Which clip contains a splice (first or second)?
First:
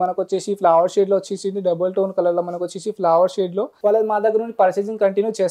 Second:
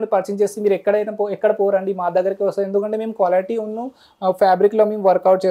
first